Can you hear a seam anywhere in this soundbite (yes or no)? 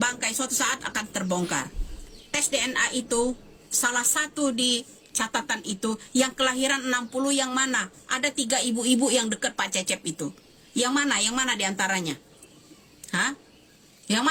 no